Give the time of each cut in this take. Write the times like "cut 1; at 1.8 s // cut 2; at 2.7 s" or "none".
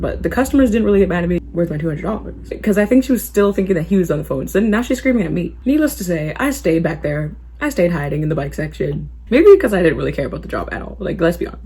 cut 1; at 1.4 s // cut 2; at 2.5 s // cut 3; at 5.5 s // cut 4; at 9.1 s